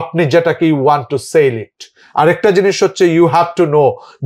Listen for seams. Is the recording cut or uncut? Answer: uncut